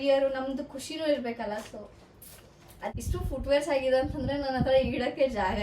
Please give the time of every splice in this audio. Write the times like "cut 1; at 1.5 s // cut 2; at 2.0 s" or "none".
cut 1; at 2.9 s